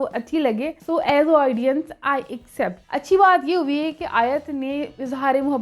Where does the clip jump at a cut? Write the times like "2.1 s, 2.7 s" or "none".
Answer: none